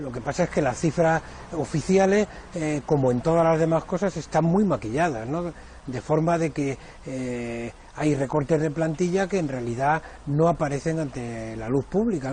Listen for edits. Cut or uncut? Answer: cut